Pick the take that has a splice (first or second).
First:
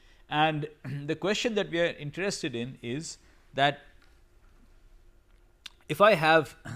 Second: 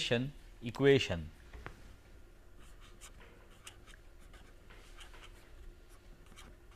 first